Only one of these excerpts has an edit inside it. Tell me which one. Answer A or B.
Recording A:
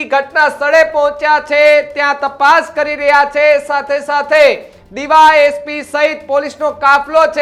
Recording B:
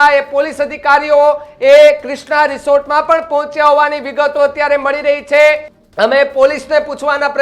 B